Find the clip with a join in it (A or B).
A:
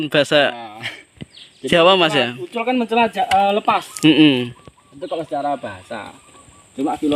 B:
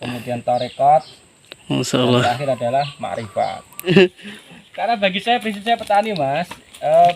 B